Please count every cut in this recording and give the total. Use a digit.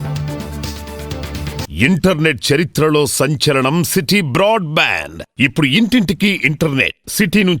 1